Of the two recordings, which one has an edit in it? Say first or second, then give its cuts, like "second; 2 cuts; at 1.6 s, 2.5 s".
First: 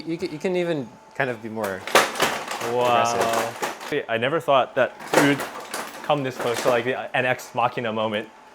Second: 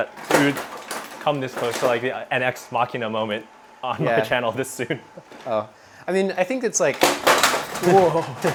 first; 1 cut; at 3.9 s